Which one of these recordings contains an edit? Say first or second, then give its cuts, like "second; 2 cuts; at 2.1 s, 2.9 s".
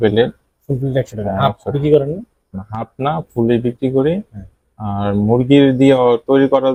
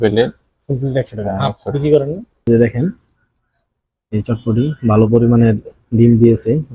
second; 1 cut; at 2.5 s